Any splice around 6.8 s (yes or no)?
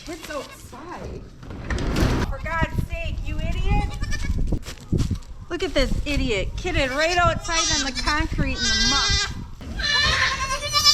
no